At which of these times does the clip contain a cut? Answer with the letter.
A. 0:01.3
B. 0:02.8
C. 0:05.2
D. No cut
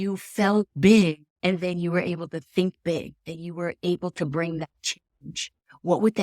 A